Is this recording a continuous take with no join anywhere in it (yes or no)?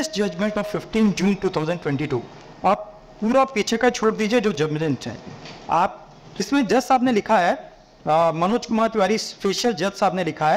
yes